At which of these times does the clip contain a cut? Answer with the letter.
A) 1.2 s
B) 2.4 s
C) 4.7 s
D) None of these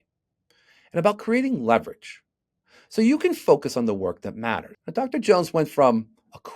C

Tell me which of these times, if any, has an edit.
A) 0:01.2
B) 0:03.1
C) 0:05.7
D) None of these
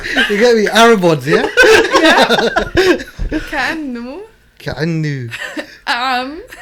D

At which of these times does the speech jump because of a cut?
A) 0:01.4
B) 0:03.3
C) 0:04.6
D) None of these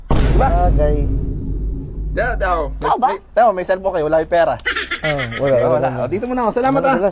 D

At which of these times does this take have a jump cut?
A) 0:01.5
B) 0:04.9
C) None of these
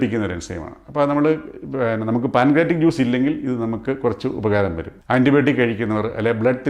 B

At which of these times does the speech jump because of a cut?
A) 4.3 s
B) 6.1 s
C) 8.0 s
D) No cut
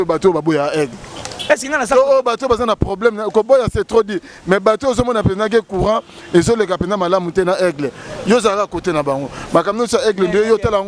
D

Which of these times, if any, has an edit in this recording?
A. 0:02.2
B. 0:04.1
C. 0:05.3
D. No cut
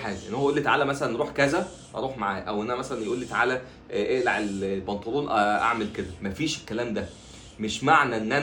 D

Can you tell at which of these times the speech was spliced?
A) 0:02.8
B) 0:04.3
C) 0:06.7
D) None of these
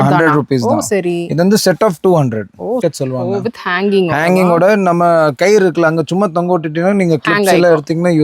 A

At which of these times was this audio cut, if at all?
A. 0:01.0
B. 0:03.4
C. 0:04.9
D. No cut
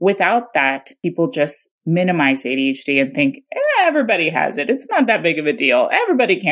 A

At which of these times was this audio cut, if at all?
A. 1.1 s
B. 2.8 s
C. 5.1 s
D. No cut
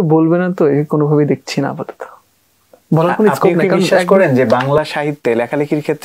D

